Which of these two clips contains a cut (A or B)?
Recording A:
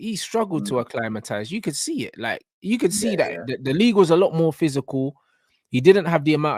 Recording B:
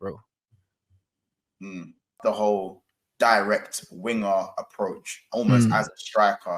B